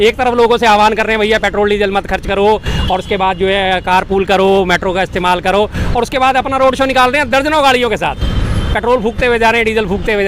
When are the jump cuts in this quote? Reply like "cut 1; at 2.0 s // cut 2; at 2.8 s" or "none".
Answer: none